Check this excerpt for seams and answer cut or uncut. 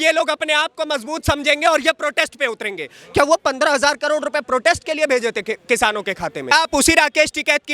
cut